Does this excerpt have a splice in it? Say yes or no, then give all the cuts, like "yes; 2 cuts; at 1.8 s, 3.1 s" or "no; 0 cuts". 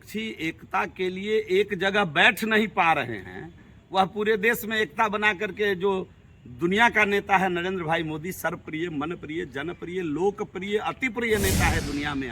no; 0 cuts